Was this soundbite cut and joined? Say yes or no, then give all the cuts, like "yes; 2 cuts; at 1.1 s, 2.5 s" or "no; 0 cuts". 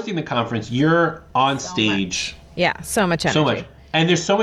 no; 0 cuts